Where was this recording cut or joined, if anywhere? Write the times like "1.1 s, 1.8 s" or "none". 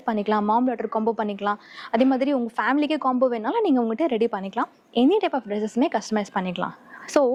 none

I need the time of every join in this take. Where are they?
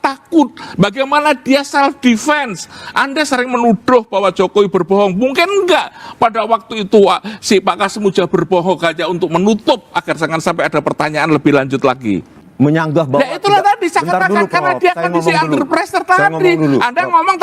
12.4 s

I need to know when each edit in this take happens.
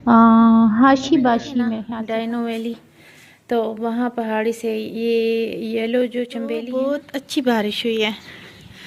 1.8 s, 6.6 s

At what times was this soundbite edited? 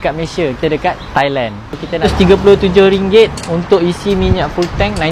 2.1 s

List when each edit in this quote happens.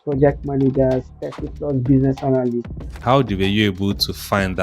3.0 s

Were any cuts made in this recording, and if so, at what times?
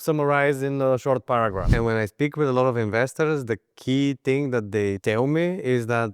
1.7 s

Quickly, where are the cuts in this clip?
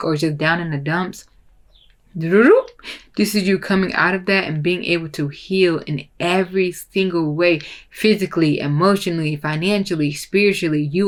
none

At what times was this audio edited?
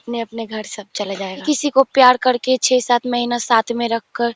1.3 s

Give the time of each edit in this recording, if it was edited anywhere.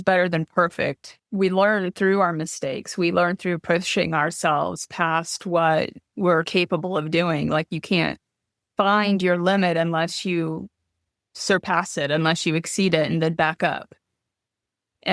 1.1 s

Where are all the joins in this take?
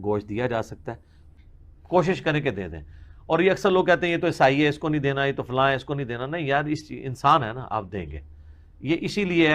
1.2 s

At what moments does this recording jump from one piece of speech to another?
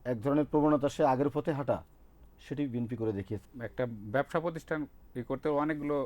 3.5 s

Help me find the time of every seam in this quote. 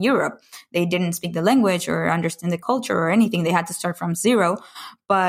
2.6 s

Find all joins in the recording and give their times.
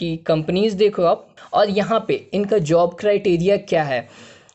1.3 s

